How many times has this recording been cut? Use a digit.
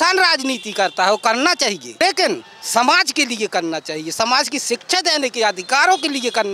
1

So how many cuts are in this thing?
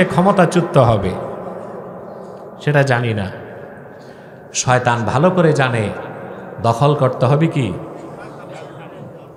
0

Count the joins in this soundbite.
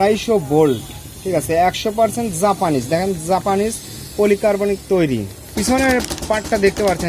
1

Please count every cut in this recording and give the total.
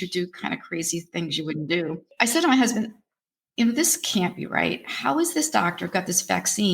1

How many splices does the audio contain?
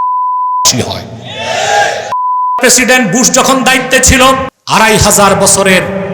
2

